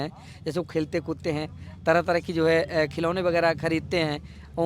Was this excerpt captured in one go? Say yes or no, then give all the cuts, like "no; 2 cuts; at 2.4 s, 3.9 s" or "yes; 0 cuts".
yes; 0 cuts